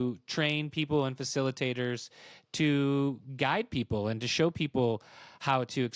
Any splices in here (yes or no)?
no